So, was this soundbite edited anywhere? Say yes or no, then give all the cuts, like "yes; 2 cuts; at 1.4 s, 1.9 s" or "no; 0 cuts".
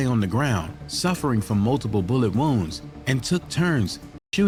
no; 0 cuts